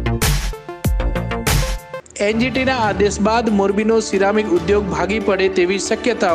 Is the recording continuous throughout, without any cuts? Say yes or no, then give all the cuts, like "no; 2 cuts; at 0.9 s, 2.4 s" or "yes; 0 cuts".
yes; 0 cuts